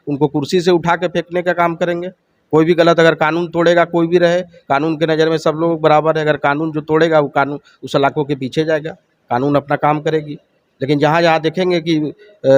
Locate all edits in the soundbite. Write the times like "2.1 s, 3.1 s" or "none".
none